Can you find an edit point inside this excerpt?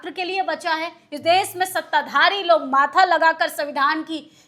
no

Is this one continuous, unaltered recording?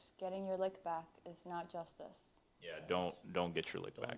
yes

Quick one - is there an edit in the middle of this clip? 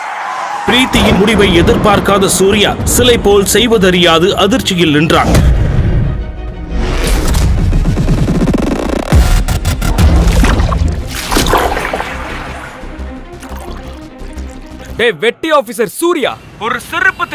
yes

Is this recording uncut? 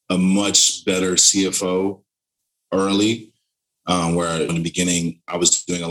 yes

